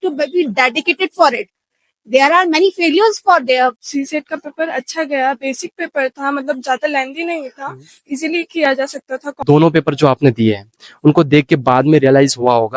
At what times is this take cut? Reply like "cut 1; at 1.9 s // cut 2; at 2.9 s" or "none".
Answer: cut 1; at 3.8 s // cut 2; at 9.4 s